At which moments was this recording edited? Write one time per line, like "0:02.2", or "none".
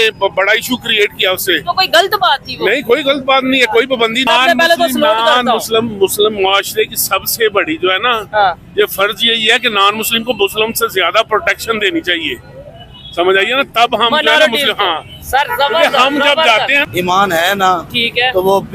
0:04.3
0:16.8